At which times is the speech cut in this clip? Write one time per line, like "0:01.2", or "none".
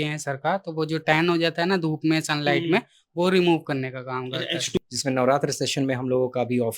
0:04.8